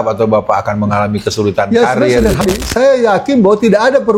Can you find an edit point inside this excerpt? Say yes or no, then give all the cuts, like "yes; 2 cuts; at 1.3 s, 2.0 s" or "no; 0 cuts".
yes; 1 cut; at 2.4 s